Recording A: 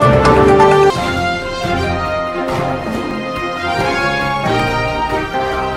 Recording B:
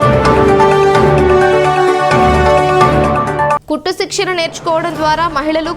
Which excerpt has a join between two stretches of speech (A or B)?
B